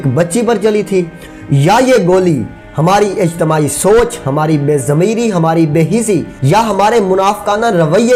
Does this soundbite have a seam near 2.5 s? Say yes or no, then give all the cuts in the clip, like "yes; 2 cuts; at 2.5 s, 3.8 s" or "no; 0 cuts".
no; 0 cuts